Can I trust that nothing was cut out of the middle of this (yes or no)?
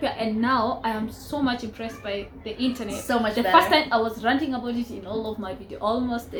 yes